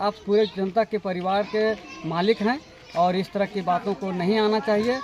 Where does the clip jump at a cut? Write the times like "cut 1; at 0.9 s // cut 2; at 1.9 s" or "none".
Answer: none